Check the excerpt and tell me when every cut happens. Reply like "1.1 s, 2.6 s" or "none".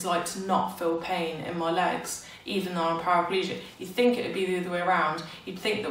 none